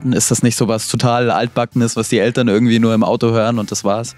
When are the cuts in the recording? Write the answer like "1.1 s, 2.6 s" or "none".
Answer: none

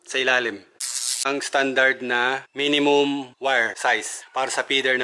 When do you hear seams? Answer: 1.2 s, 2.5 s, 3.9 s

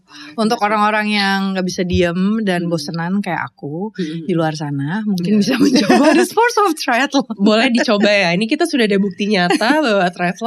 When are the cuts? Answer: none

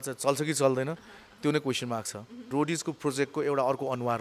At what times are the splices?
2.5 s

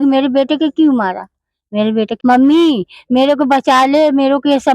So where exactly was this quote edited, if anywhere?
2.1 s

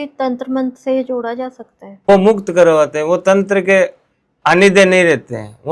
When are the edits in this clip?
none

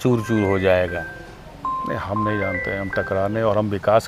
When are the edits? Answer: none

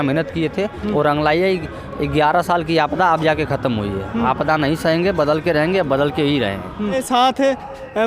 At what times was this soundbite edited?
7.0 s

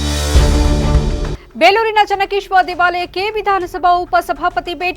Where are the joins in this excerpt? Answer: 0.9 s

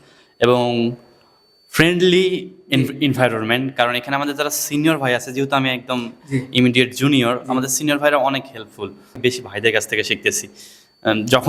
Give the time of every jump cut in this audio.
none

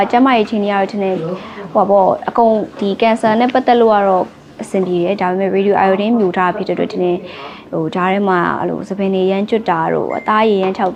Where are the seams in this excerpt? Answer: none

